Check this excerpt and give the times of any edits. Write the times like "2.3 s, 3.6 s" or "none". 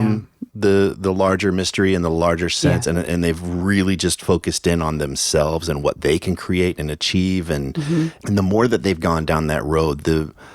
8.2 s